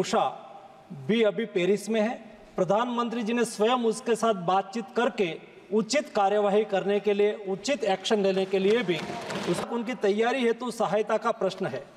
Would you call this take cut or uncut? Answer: cut